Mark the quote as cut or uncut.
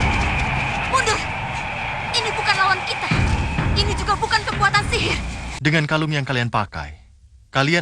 cut